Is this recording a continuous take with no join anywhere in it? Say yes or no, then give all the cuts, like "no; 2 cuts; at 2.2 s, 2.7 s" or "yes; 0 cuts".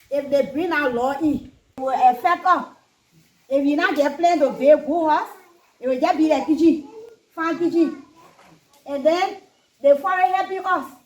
no; 1 cut; at 1.6 s